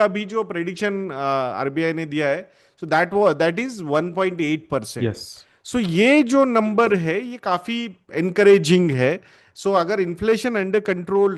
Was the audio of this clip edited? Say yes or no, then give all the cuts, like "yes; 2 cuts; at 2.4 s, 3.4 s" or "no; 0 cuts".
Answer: no; 0 cuts